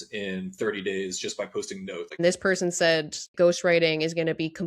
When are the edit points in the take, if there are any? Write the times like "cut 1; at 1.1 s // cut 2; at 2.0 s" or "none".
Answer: cut 1; at 2.2 s // cut 2; at 3.2 s